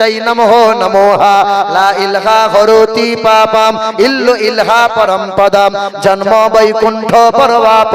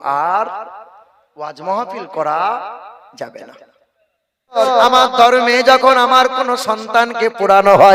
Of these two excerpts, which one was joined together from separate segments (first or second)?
second